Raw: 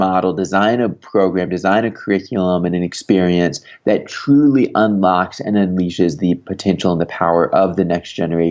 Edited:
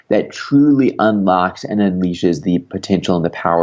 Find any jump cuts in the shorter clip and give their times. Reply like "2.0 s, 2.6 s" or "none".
none